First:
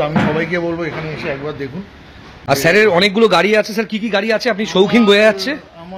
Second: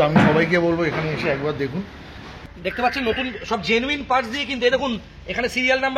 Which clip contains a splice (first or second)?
second